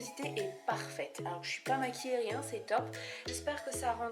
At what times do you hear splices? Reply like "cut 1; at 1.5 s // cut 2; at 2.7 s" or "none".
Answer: cut 1; at 3.1 s